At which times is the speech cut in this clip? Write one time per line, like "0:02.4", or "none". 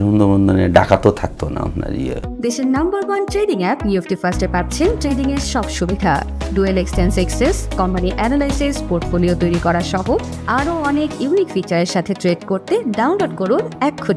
0:02.3